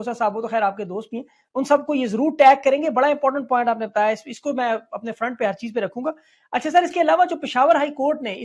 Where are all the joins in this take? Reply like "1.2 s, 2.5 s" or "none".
none

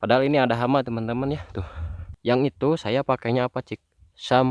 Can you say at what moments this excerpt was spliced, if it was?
2.1 s

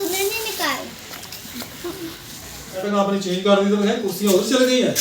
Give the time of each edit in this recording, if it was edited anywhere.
2.9 s

